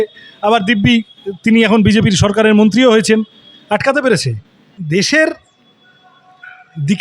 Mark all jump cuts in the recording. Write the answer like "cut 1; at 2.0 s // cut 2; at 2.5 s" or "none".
cut 1; at 4.7 s

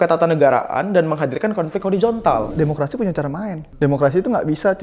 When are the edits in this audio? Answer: cut 1; at 2.5 s // cut 2; at 3.6 s

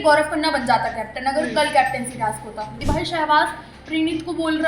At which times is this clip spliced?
cut 1; at 2.8 s

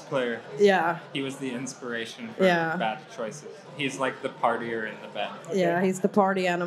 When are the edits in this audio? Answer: cut 1; at 1.1 s // cut 2; at 3.7 s // cut 3; at 5.4 s

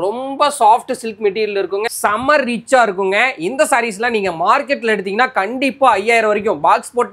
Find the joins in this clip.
cut 1; at 1.9 s

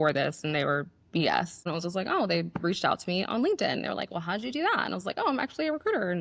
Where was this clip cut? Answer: cut 1; at 1.6 s

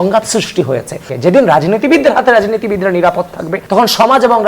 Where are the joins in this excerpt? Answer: cut 1; at 1.1 s // cut 2; at 3.6 s

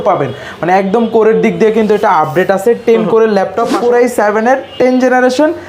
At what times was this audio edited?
cut 1; at 3.8 s

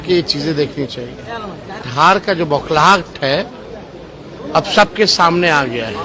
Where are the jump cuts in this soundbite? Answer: cut 1; at 1.9 s

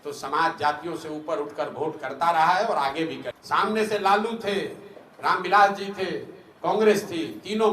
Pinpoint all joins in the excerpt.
cut 1; at 3.3 s

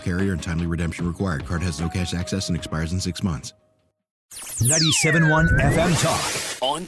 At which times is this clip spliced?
cut 1; at 4.4 s

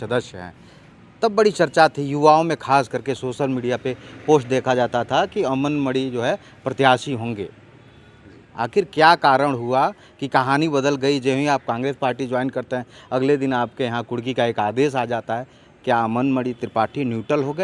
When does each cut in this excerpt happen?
none

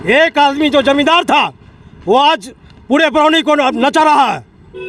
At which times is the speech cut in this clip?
none

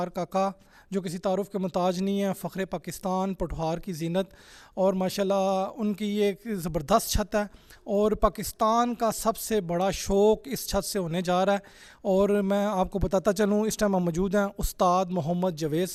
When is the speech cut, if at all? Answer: none

